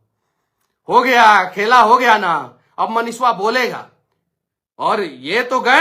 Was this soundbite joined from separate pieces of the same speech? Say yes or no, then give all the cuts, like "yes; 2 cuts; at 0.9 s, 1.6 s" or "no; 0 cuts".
no; 0 cuts